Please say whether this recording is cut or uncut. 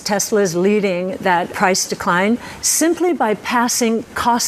cut